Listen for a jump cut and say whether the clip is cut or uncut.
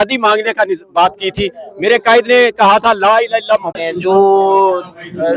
cut